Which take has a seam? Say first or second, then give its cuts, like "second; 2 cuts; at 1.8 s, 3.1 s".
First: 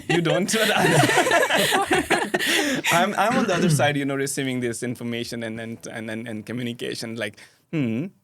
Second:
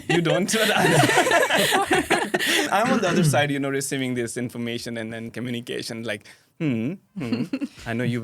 second; 2 cuts; at 2.7 s, 5.3 s